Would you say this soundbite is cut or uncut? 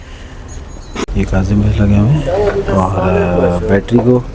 cut